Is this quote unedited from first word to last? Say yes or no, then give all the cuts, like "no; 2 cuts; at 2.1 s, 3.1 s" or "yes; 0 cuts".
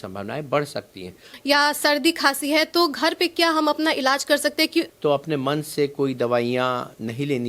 no; 2 cuts; at 1.3 s, 4.9 s